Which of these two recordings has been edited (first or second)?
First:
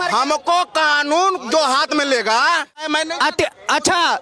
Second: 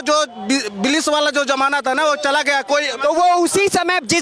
first